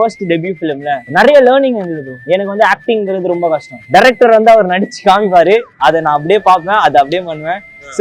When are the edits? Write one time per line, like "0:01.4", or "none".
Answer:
0:01.0
0:02.1
0:03.7